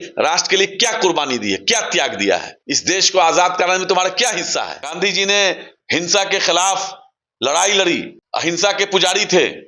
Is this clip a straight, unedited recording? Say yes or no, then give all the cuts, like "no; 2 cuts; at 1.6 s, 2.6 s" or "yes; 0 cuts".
no; 4 cuts; at 2.5 s, 4.8 s, 5.8 s, 8.2 s